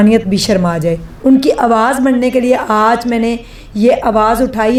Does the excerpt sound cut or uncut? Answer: uncut